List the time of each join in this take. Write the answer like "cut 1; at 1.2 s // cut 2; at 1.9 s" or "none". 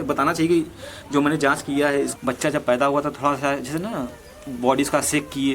cut 1; at 2.1 s

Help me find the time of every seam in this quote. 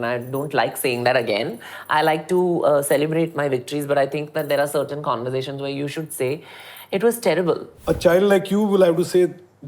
cut 1; at 7.7 s

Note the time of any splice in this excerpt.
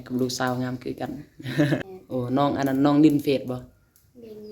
cut 1; at 1.7 s

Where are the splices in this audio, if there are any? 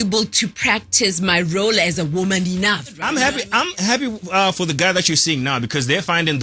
cut 1; at 3.0 s

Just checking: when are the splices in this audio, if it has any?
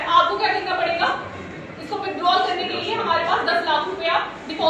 none

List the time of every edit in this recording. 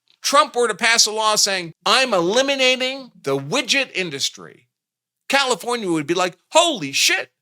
cut 1; at 1.7 s

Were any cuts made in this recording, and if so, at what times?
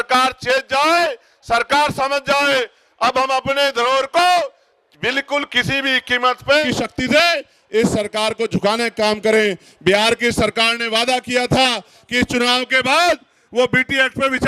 cut 1; at 6.6 s

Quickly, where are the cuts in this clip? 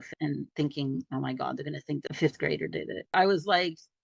cut 1; at 2.1 s // cut 2; at 3.1 s

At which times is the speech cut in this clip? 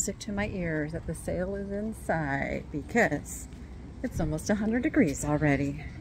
none

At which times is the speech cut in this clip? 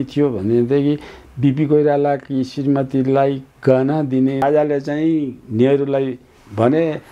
cut 1; at 4.4 s

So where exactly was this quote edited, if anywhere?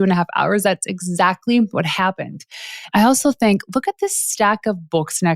cut 1; at 2.9 s

